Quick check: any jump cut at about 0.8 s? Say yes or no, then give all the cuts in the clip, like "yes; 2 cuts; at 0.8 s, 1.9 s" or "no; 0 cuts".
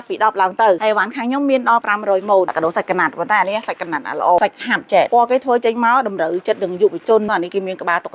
yes; 4 cuts; at 0.8 s, 2.5 s, 5.0 s, 7.3 s